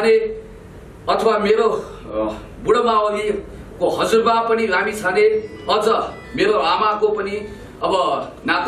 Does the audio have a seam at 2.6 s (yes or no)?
no